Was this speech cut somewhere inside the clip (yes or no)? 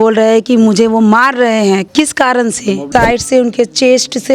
yes